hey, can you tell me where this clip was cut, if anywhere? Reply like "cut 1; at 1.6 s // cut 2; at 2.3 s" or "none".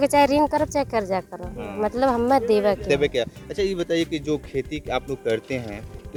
none